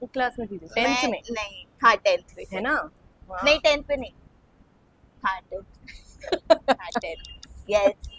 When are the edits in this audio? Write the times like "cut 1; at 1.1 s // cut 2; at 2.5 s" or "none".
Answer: none